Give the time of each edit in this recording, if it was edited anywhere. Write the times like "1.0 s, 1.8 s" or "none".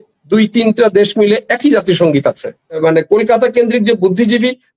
2.8 s